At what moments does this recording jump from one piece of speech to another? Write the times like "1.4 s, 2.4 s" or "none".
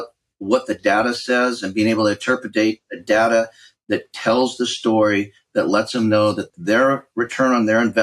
6.5 s